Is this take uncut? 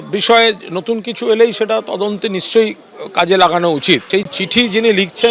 no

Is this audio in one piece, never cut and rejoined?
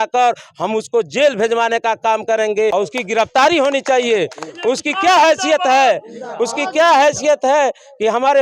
no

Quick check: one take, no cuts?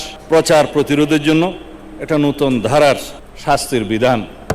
yes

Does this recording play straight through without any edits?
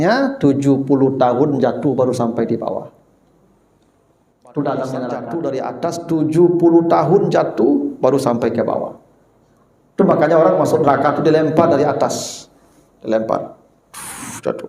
no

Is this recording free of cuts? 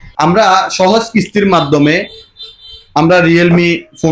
yes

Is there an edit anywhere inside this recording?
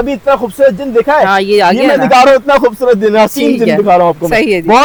no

